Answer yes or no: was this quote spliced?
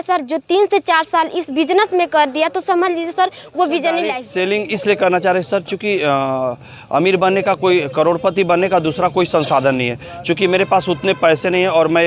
yes